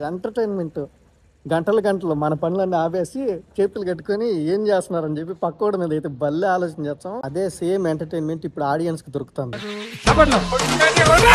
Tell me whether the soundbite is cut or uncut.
cut